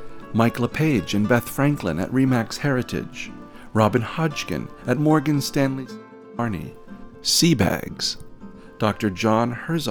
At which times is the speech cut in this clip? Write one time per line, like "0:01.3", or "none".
none